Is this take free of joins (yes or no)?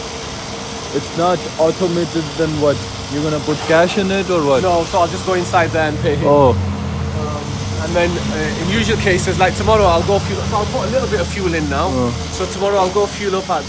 yes